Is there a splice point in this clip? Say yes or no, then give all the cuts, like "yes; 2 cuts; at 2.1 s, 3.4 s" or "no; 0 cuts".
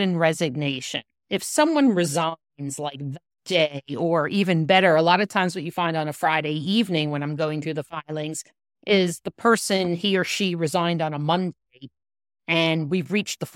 no; 0 cuts